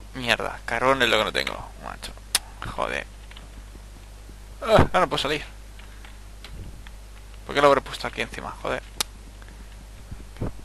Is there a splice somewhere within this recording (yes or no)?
no